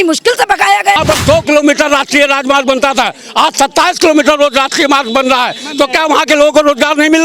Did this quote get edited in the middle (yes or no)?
yes